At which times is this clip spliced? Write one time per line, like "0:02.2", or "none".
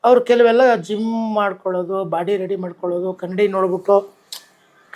none

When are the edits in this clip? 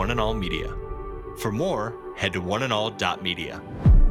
none

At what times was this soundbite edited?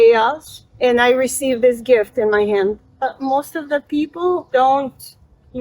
0:00.8
0:02.9
0:04.4

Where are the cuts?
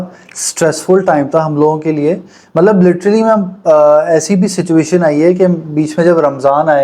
none

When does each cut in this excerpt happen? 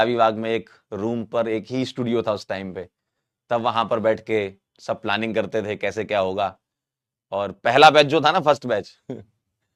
none

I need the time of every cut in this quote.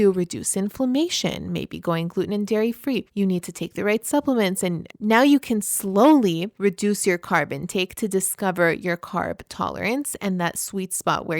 0:03.1
0:04.9
0:06.5

